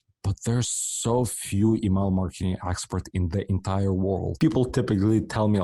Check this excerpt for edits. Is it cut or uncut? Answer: cut